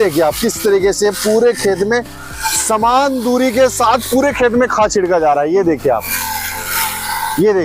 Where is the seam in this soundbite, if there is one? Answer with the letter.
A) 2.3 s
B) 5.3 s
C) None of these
C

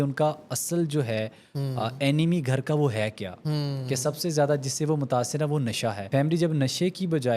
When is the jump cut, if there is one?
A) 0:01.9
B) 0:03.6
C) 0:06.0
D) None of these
C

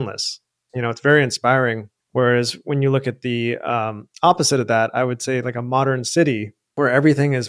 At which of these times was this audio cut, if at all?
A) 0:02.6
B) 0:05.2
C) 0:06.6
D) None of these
C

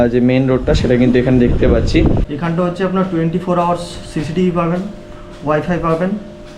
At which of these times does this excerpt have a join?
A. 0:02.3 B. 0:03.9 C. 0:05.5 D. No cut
A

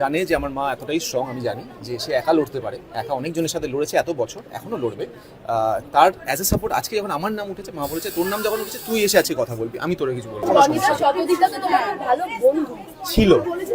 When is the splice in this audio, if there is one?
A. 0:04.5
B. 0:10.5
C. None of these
B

